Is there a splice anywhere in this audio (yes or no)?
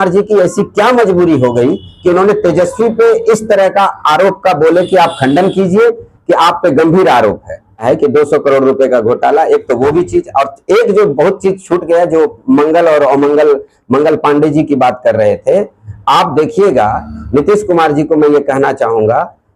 yes